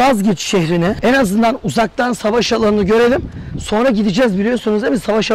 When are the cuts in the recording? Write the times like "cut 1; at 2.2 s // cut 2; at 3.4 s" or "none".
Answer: cut 1; at 1.0 s